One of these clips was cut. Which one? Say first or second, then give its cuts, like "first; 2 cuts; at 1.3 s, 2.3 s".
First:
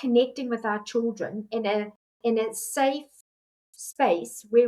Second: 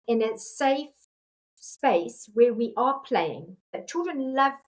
second; 1 cut; at 3.6 s